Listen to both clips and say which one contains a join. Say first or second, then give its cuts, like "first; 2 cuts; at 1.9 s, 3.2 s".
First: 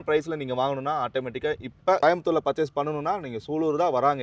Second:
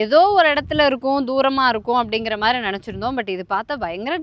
first; 1 cut; at 2.0 s